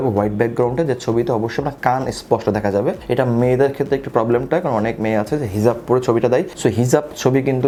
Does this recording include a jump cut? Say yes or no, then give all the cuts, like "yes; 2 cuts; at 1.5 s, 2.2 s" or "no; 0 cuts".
no; 0 cuts